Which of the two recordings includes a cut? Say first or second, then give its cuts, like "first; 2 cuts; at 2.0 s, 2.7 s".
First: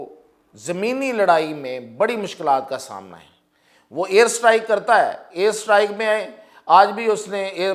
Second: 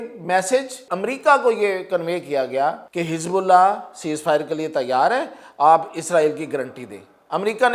second; 2 cuts; at 0.9 s, 2.8 s